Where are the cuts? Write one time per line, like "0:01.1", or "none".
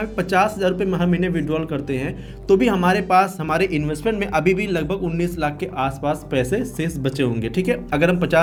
none